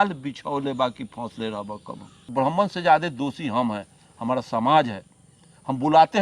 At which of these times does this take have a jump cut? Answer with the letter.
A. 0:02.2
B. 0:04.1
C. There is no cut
A